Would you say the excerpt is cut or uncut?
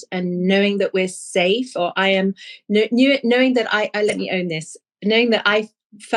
uncut